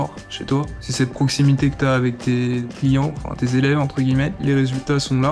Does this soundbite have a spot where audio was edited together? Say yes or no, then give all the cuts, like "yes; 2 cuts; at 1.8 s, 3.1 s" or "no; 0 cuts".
yes; 2 cuts; at 2.7 s, 4.4 s